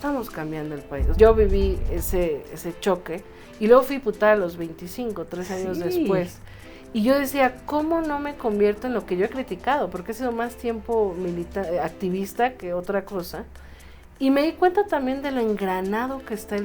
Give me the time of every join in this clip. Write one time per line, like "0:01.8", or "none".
0:01.1